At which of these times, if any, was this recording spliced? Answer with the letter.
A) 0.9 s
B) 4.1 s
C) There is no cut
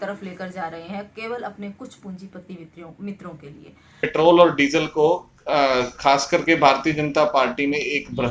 B